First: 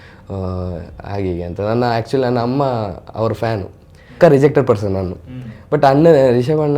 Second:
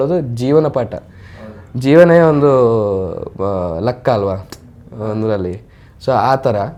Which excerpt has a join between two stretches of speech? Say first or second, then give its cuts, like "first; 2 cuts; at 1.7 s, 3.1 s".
first; 1 cut; at 4.2 s